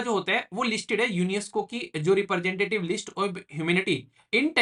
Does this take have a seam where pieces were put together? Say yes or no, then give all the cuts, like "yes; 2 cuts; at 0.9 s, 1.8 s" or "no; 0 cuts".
no; 0 cuts